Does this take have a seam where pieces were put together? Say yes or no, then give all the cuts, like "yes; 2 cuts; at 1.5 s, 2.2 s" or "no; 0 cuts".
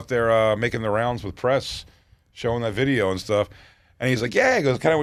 no; 0 cuts